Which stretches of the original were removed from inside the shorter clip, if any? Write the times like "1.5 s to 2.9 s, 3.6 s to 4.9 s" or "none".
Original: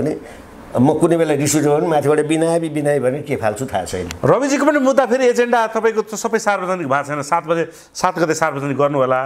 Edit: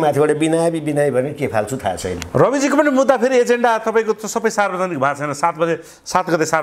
none